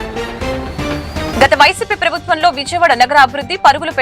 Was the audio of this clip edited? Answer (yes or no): yes